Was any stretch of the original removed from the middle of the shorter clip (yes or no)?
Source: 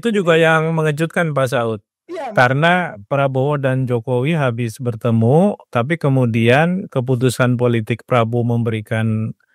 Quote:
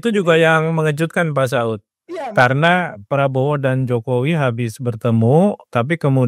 no